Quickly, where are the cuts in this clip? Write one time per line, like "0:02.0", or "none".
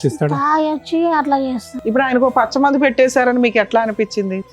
0:01.7